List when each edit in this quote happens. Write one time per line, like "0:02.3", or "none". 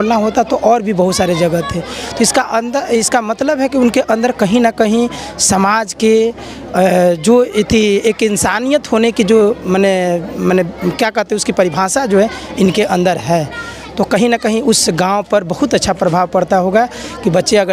none

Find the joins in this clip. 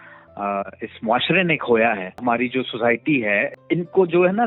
0:02.2
0:03.5

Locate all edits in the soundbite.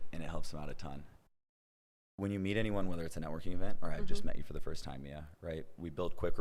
0:01.2

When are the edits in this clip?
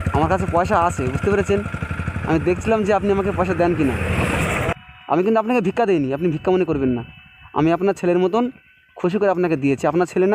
0:04.7

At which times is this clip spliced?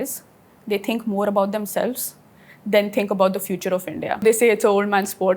0:04.2

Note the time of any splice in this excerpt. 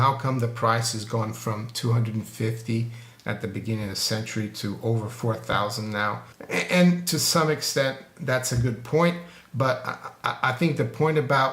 0:06.3

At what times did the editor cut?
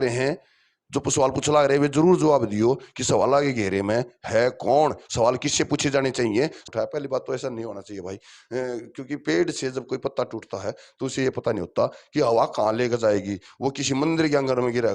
0:06.6

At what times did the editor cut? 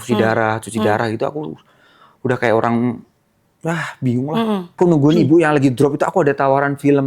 0:04.7

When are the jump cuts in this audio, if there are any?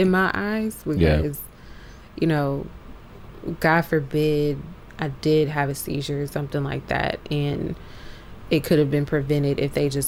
none

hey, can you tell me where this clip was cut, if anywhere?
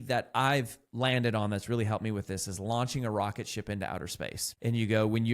0:04.4

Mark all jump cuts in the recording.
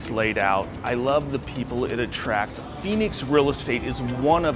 0:02.6

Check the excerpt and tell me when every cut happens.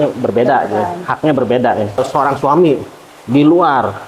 0:02.2

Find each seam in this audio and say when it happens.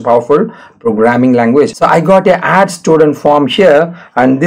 0:01.7

